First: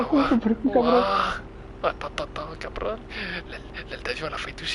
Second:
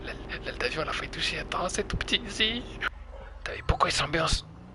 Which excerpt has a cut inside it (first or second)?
second